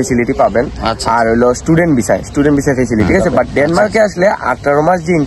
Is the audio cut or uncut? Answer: cut